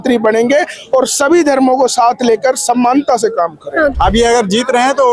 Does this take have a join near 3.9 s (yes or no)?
yes